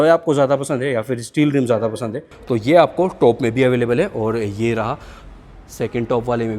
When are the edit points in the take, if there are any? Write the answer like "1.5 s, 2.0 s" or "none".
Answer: 2.3 s